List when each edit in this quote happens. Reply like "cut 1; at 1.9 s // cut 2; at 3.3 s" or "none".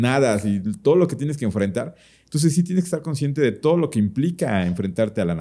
none